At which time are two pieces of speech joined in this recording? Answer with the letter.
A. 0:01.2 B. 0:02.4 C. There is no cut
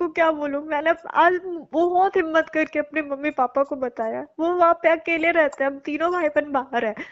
C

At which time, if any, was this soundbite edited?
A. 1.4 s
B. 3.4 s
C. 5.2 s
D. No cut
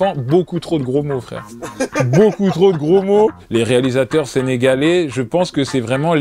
B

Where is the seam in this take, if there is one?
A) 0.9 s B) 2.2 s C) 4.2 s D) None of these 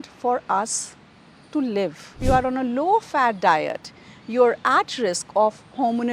B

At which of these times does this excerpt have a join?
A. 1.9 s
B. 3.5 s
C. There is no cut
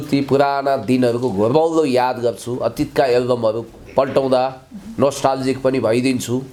C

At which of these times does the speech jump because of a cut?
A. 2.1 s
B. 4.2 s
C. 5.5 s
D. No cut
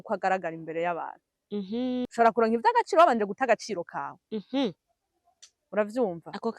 A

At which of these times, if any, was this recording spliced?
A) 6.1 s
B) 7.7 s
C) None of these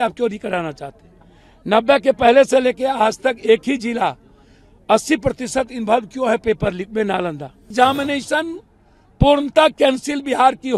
B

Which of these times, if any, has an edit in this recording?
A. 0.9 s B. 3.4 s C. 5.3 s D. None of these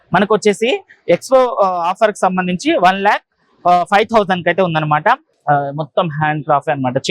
C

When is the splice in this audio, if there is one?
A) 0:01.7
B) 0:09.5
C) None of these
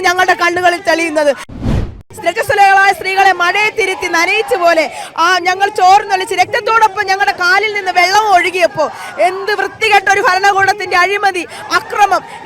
A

